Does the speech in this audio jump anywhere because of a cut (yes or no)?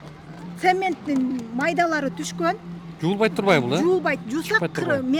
no